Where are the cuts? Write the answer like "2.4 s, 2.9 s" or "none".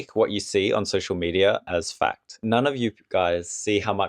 2.4 s